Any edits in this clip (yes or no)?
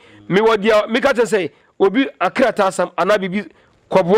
no